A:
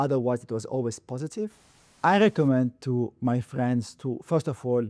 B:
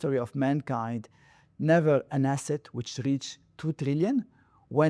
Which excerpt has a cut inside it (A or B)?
A